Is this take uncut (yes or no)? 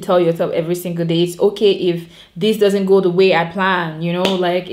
yes